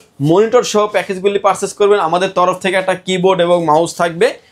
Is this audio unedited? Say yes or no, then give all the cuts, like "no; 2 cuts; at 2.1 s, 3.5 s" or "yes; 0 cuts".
yes; 0 cuts